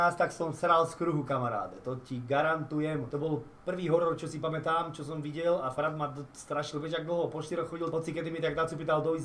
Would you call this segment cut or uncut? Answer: uncut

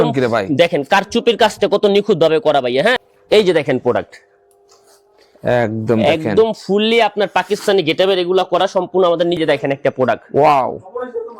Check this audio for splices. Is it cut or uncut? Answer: cut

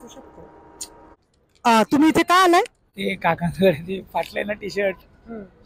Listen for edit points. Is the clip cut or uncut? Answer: cut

